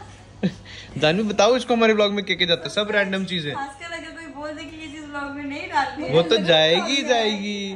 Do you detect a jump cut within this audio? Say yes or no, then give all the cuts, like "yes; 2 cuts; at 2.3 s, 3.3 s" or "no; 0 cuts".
no; 0 cuts